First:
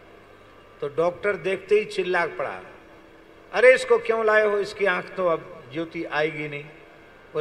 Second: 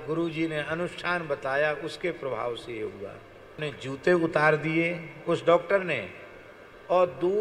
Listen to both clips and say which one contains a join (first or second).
second